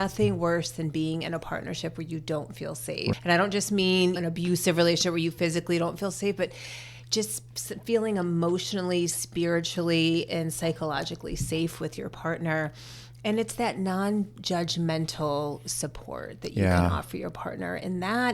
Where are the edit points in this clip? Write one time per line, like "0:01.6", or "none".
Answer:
0:03.1